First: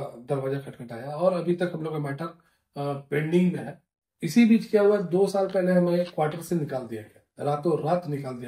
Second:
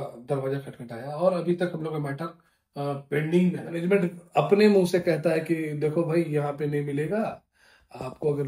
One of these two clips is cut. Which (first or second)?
second